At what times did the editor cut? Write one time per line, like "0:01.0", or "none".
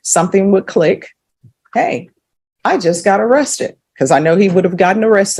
none